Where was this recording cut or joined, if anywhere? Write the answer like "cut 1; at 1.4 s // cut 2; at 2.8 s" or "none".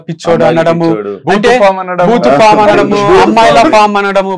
none